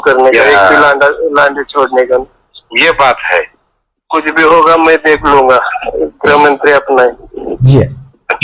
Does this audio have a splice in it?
no; 0 cuts

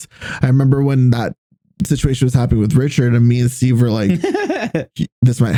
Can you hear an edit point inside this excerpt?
no; 0 cuts

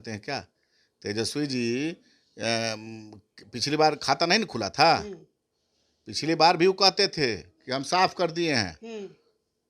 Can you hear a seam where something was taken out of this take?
no; 0 cuts

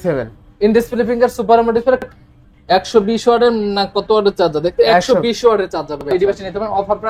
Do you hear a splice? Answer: yes; 2 cuts; at 2.0 s, 6.1 s

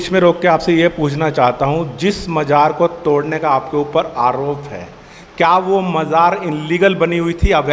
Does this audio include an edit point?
no; 0 cuts

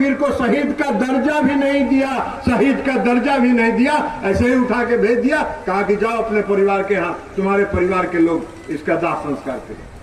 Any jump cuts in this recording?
no; 0 cuts

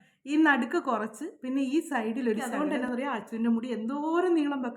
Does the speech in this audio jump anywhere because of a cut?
yes; 1 cut; at 2.5 s

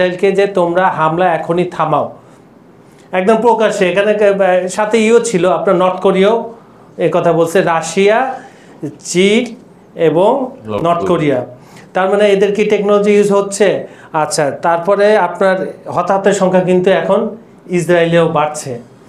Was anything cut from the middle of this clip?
no; 0 cuts

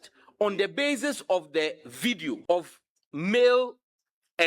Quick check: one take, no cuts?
no; 1 cut; at 2.4 s

